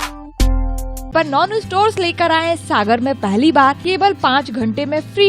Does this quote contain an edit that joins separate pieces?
yes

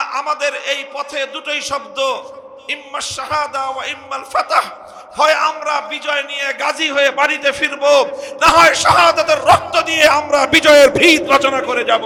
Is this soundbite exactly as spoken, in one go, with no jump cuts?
yes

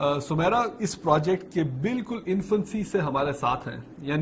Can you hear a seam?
no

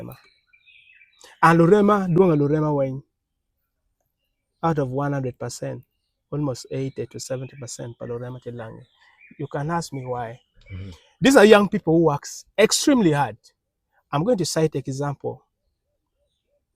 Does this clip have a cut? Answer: no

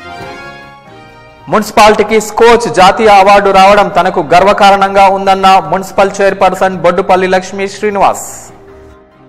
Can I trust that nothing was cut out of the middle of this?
no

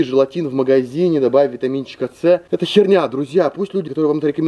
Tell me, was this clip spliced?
no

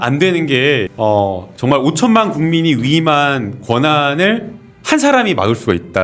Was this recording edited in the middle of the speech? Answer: yes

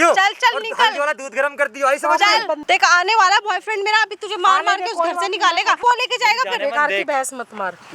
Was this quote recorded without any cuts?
no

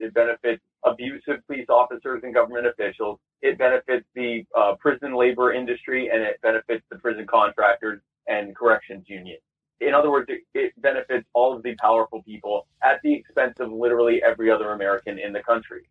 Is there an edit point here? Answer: no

